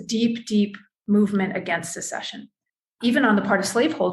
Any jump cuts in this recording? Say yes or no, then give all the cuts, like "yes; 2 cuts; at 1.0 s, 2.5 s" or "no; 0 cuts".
yes; 1 cut; at 3.0 s